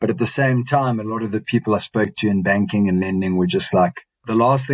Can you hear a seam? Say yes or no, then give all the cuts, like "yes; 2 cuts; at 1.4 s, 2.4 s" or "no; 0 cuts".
no; 0 cuts